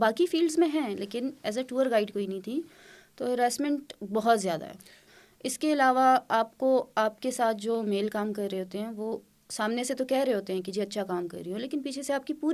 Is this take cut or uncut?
uncut